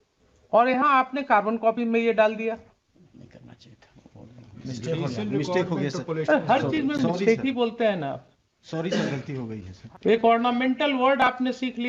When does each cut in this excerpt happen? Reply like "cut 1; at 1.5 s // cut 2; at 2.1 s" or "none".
cut 1; at 2.8 s // cut 2; at 9.7 s